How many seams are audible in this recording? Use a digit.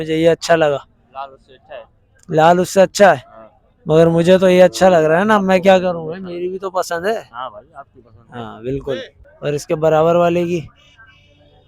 1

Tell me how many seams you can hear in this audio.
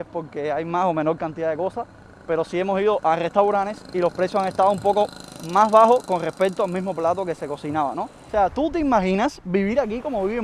1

